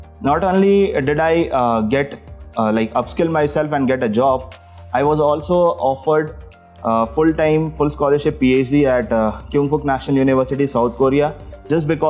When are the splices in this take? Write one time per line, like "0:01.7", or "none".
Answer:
none